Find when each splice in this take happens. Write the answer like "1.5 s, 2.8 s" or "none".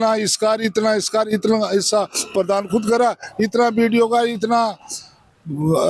none